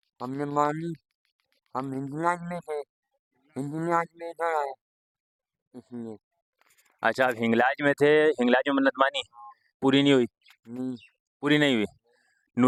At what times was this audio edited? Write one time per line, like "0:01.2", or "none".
none